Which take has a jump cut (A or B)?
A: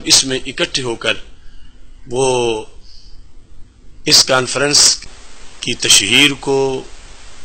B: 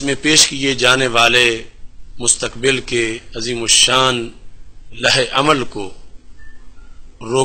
A